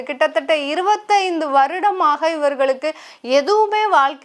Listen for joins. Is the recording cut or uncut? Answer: uncut